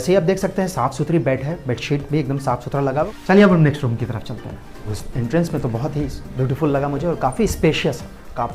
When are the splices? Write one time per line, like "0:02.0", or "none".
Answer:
0:03.1
0:04.8

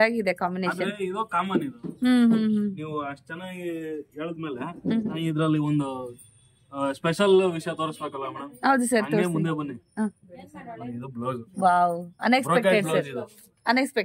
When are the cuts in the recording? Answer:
none

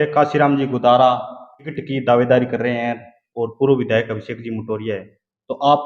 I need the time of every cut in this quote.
0:01.8

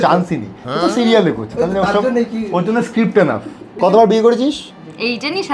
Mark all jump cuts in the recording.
0:03.7

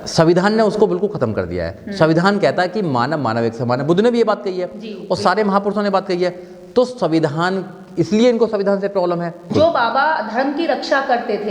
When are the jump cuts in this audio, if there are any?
0:09.5

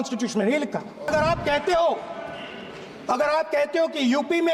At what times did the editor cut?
0:01.1

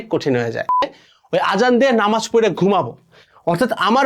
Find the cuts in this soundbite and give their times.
0:01.0

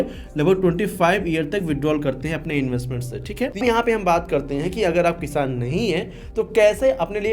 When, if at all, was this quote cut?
0:03.6

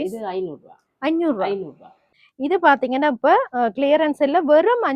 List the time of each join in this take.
0:02.0

